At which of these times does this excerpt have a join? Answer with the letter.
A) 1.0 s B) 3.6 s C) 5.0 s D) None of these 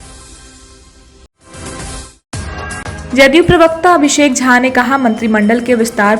D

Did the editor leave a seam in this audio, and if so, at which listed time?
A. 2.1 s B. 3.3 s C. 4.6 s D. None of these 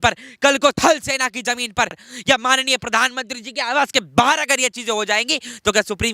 A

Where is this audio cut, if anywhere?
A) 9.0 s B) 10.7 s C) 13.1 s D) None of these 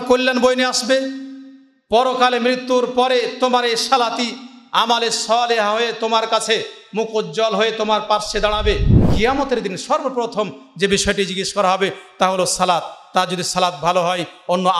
A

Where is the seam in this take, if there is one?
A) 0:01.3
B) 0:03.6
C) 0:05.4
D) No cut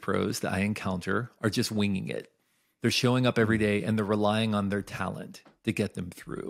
A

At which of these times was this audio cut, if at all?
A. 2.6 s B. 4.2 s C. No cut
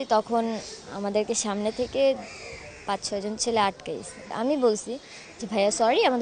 B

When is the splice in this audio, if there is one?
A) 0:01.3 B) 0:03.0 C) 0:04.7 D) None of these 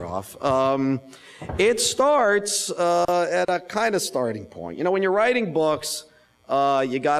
B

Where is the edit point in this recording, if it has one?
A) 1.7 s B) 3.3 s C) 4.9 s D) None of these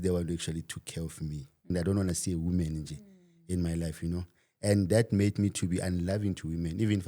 A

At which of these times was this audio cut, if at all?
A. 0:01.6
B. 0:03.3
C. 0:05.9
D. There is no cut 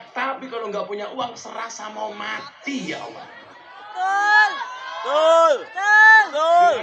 D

